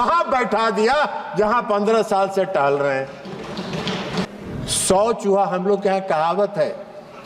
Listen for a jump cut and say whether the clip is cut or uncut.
cut